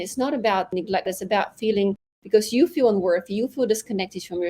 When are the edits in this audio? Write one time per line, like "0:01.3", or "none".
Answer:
0:01.0